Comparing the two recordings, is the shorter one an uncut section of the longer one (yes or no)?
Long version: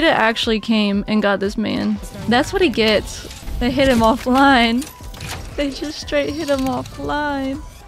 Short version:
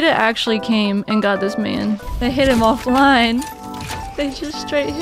no